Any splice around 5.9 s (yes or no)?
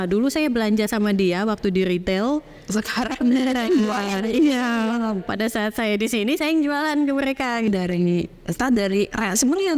no